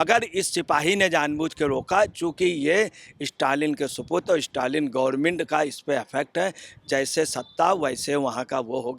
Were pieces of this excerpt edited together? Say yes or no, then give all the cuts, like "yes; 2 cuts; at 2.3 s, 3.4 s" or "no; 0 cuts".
no; 0 cuts